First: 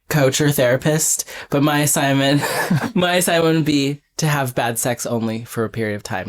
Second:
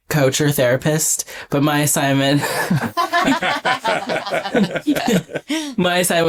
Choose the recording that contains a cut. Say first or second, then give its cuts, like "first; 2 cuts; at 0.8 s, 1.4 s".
first; 1 cut; at 2.9 s